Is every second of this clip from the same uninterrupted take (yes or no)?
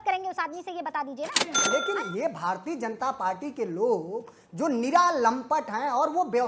no